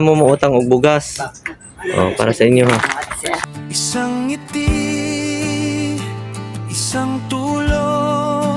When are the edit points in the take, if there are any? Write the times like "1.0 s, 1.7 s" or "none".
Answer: 3.4 s